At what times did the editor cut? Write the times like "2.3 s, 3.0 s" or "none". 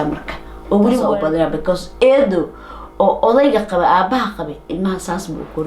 1.1 s